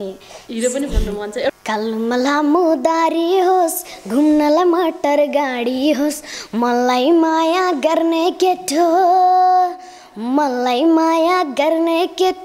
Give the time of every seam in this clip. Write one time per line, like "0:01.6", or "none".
0:01.3